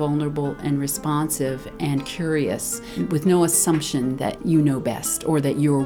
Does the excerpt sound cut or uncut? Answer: cut